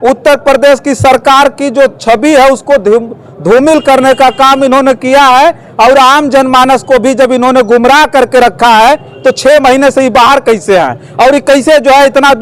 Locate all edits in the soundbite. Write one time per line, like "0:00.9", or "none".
none